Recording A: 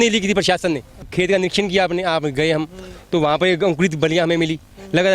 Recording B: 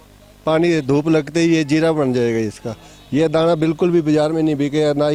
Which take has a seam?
A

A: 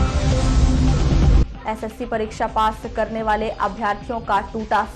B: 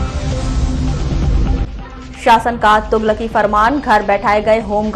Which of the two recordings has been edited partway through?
A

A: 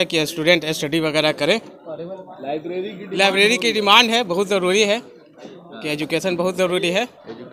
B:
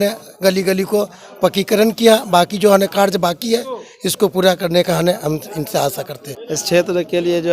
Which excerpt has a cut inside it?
B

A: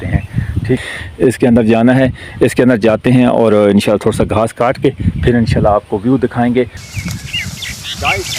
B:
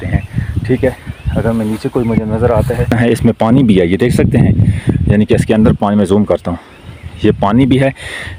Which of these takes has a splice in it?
A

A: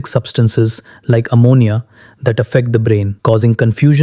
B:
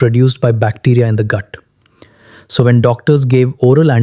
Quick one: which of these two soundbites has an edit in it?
A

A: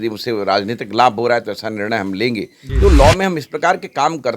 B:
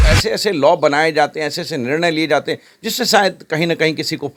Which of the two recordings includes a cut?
A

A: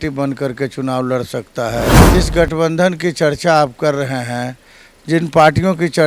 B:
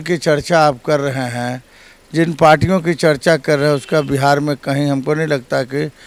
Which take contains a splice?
A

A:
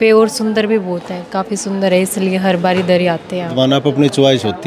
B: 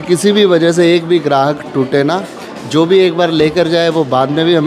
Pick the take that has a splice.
A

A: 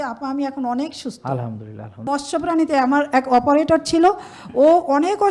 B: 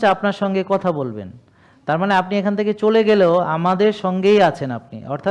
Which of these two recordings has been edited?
A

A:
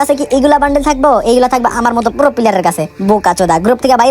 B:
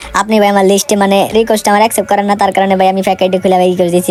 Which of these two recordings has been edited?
A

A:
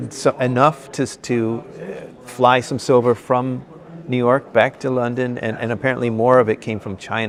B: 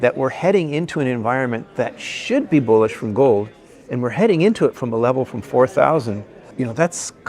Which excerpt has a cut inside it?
B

